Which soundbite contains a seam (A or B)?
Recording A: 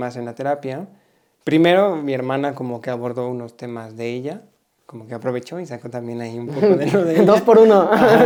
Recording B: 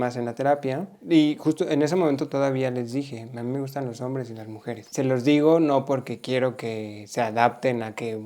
B